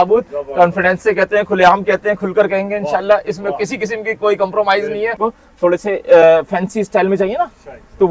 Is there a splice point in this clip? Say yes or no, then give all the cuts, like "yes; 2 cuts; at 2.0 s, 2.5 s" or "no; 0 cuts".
yes; 1 cut; at 5.2 s